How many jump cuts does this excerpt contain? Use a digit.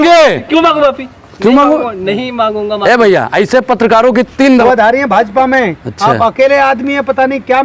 1